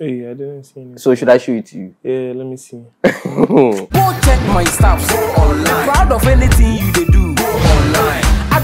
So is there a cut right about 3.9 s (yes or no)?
yes